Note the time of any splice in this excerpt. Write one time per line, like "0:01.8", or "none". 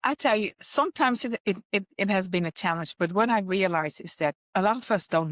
0:04.4

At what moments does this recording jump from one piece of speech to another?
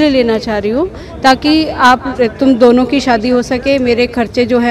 none

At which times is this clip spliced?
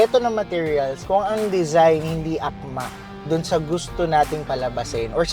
0:01.0

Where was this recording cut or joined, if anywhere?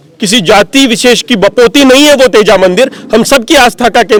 none

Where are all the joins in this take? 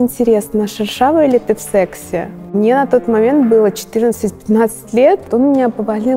0:02.5
0:05.3

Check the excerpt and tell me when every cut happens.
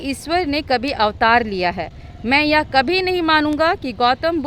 none

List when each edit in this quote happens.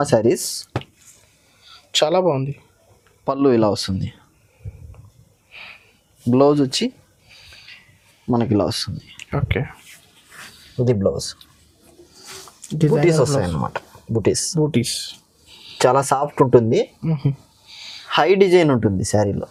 none

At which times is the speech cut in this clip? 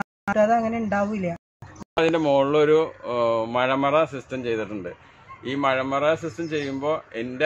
0:01.9

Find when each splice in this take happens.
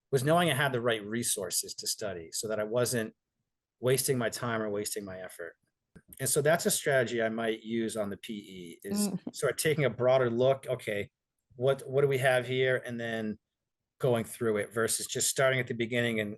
0:06.0

